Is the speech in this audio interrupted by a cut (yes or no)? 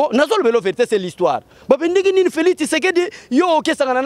no